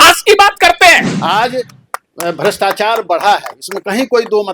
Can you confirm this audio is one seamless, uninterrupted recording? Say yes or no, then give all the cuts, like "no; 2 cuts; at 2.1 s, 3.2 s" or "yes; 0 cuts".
no; 1 cut; at 1.1 s